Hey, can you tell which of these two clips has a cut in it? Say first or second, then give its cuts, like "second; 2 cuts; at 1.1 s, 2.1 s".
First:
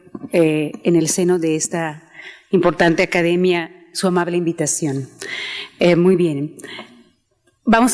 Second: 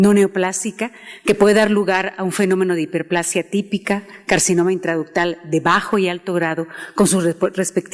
second; 1 cut; at 3.3 s